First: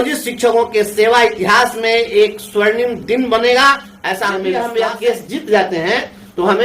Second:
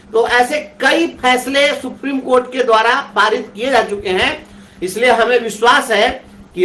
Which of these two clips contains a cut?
first; 1 cut; at 4.5 s

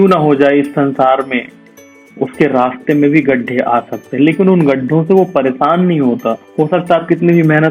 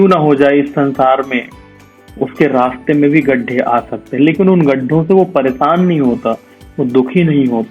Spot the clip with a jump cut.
first; 1 cut; at 6.4 s

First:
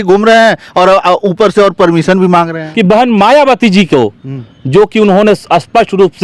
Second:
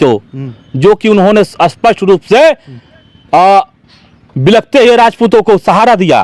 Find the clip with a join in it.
first; 1 cut; at 2.6 s

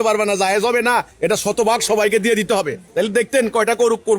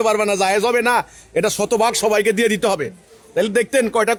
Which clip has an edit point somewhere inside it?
first; 2 cuts; at 1.1 s, 2.8 s

